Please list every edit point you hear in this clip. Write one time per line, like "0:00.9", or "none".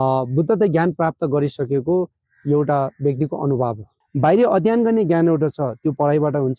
0:04.0